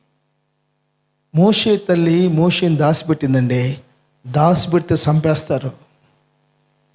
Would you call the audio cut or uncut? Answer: uncut